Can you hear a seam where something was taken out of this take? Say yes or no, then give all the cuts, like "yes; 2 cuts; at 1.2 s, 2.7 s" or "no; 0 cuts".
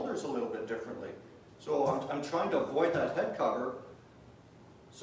no; 0 cuts